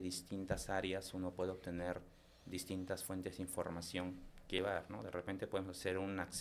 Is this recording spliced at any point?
yes; 1 cut; at 4.6 s

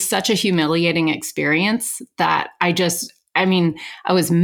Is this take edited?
no; 0 cuts

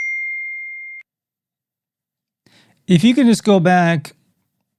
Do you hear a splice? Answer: no; 0 cuts

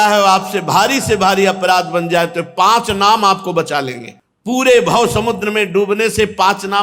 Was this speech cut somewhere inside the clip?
no; 0 cuts

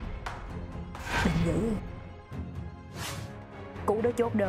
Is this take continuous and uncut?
no; 1 cut; at 3.0 s

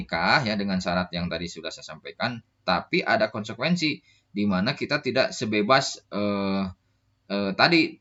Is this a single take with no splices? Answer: yes; 0 cuts

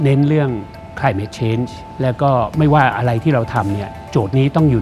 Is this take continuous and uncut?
no; 1 cut; at 1.8 s

